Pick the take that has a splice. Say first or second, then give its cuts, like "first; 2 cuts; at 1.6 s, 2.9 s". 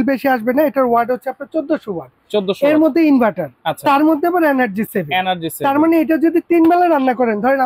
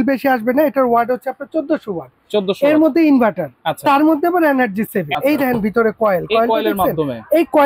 second; 1 cut; at 5.1 s